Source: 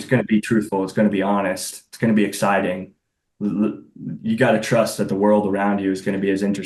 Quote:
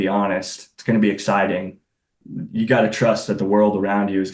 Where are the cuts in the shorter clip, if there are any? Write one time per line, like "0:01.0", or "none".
0:02.1